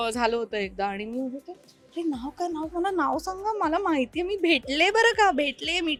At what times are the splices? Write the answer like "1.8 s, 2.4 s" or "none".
none